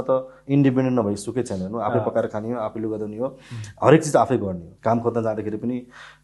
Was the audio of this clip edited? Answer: yes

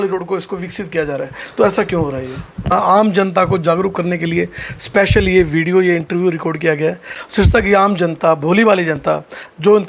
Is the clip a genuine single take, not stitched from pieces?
no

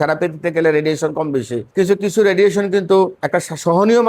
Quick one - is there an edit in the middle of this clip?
yes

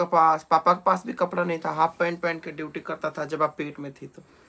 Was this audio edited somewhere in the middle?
no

